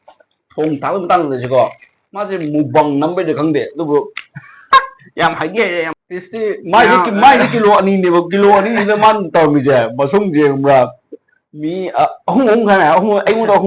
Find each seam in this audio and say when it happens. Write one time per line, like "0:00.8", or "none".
0:05.9